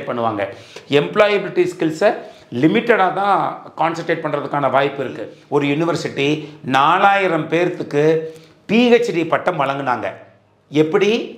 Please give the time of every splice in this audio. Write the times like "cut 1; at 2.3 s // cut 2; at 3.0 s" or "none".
cut 1; at 5.3 s